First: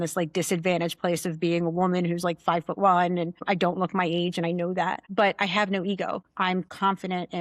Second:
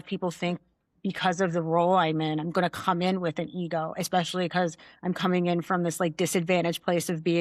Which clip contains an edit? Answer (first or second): first